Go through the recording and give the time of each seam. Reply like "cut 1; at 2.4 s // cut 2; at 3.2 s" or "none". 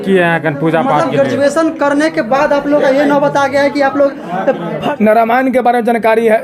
cut 1; at 4.8 s